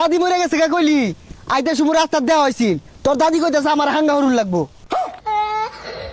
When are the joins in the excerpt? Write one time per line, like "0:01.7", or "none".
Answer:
none